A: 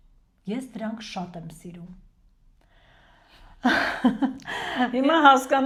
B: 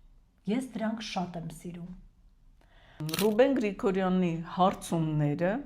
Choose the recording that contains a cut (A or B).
B